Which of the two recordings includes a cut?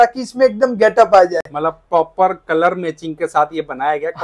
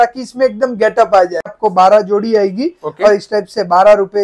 second; 1 cut; at 1.5 s

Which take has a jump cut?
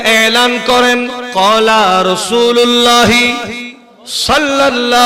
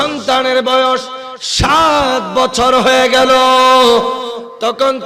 first; 1 cut; at 1.2 s

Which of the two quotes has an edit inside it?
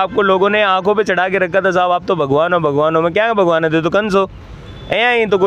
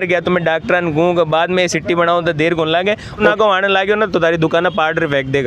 second; 1 cut; at 3.2 s

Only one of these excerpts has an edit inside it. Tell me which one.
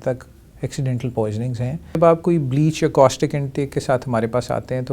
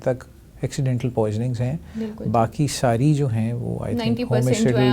first; 1 cut; at 2.0 s

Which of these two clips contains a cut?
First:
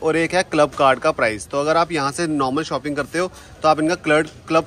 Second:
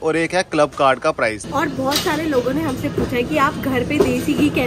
second; 1 cut; at 1.4 s

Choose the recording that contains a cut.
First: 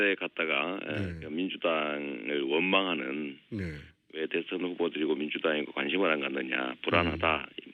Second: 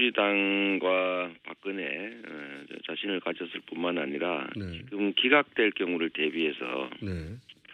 first; 1 cut; at 3.4 s

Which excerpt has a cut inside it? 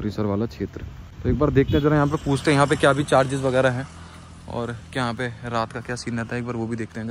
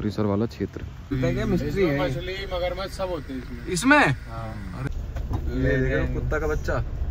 second; 2 cuts; at 1.2 s, 4.8 s

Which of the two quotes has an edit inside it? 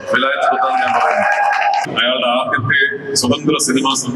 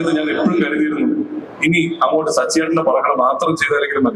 first; 1 cut; at 1.8 s

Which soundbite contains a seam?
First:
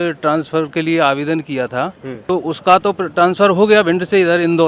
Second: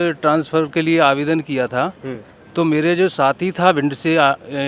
first; 1 cut; at 2.1 s

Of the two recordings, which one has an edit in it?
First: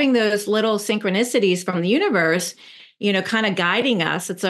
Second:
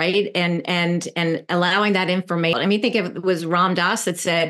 second; 1 cut; at 2.6 s

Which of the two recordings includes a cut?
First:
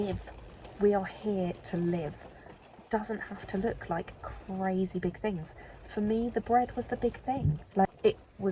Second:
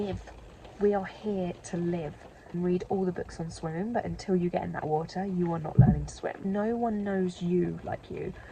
second; 2 cuts; at 2.5 s, 6.4 s

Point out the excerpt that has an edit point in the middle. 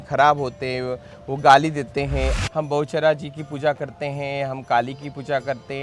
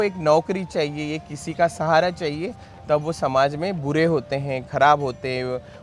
first; 1 cut; at 2.4 s

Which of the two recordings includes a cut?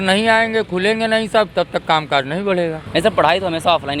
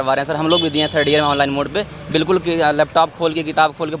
first; 1 cut; at 2.8 s

